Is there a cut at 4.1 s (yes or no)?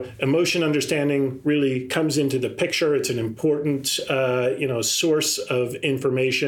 no